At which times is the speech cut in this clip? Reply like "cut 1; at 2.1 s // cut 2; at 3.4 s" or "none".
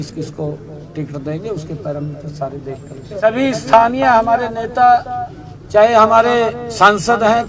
cut 1; at 3.2 s